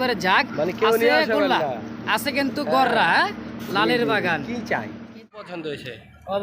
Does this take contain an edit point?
yes; 1 cut; at 5.4 s

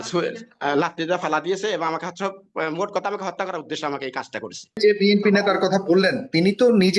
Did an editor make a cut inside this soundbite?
yes; 1 cut; at 4.8 s

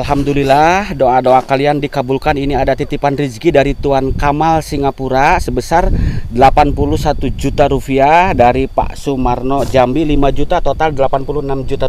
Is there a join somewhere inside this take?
no; 0 cuts

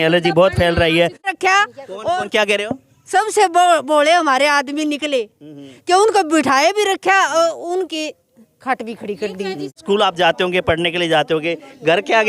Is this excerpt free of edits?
no; 2 cuts; at 1.3 s, 9.7 s

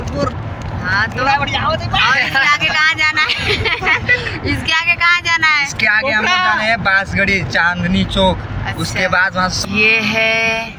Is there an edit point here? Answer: yes; 1 cut; at 9.6 s

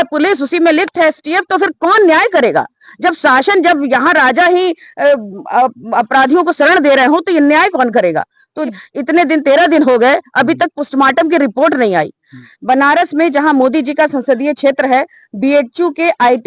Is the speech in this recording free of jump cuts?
no; 2 cuts; at 8.8 s, 12.4 s

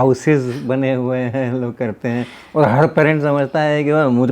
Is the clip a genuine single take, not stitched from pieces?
yes; 0 cuts

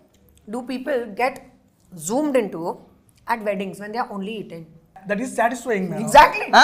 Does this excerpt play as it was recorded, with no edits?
no; 1 cut; at 5.0 s

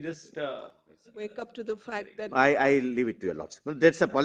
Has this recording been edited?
no; 0 cuts

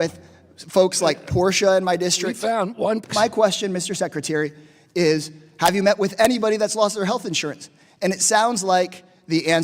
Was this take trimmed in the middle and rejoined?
yes; 1 cut; at 3.0 s

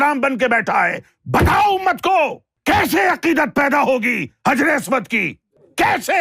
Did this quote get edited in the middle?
yes; 1 cut; at 2.5 s

